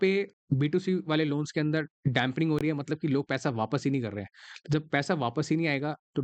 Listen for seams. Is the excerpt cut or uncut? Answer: uncut